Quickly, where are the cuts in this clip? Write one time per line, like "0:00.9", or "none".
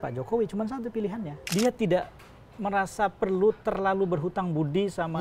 0:01.3